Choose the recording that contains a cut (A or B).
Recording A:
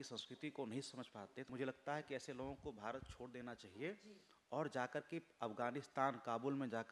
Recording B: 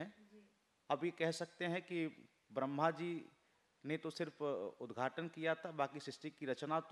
A